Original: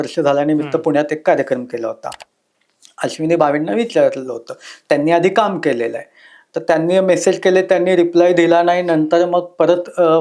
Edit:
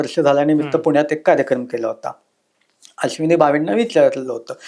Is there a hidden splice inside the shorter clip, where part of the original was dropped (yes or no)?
no